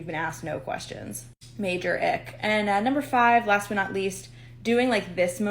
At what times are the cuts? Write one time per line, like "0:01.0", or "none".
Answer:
0:02.0

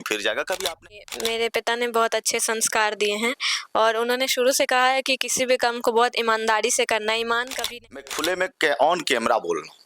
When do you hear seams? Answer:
0:01.0
0:08.0

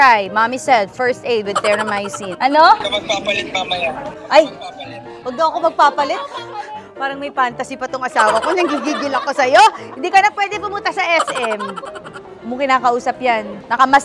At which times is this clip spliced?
0:02.2
0:11.8

